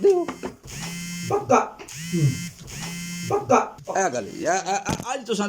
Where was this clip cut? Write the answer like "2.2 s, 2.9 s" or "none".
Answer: 3.8 s